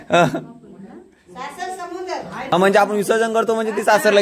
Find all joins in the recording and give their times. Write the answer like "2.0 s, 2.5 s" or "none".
2.5 s